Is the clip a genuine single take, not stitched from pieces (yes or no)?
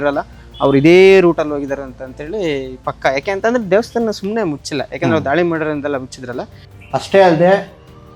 no